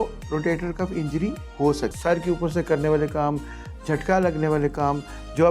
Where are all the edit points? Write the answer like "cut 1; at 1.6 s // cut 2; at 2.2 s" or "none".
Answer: cut 1; at 2.0 s